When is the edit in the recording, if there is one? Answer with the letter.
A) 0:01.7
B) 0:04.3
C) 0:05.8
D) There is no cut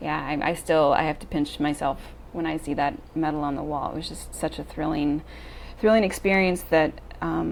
D